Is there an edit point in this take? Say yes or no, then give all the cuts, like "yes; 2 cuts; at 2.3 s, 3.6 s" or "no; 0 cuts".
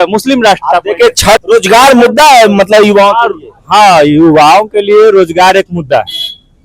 yes; 1 cut; at 1.4 s